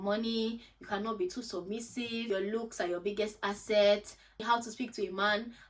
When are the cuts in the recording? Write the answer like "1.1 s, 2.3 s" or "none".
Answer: 2.3 s, 4.4 s